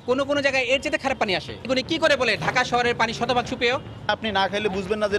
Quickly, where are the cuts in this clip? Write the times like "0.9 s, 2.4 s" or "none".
1.5 s, 4.1 s